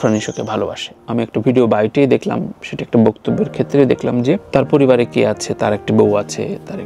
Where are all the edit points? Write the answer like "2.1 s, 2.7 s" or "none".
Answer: 0.9 s